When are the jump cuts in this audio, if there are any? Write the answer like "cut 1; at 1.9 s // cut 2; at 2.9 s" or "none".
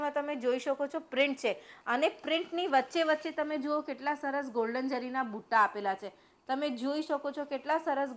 none